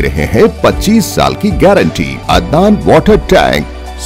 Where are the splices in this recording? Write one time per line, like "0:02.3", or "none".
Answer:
0:02.2